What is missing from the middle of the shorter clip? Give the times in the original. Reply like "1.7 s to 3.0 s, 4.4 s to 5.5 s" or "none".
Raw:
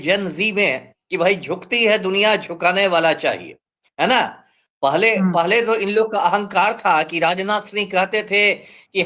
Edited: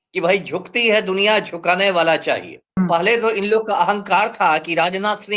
3.7 s to 5.2 s

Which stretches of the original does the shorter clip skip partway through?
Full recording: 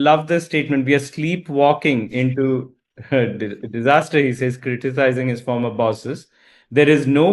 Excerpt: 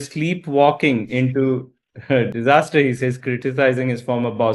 3.3 s to 3.7 s

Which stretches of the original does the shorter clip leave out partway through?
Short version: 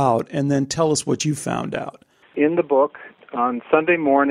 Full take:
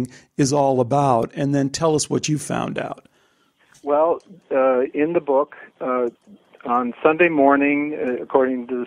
3.4 s to 4.9 s, 5.7 s to 6.4 s

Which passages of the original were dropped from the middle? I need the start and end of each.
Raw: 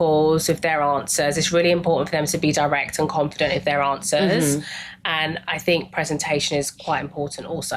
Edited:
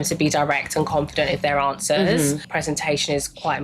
4.7 s to 5.9 s

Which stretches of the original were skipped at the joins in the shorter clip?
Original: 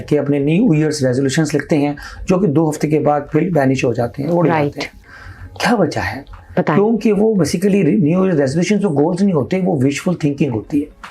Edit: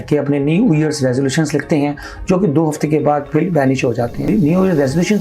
4.3 s to 7.9 s

